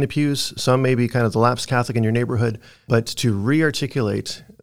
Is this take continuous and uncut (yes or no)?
no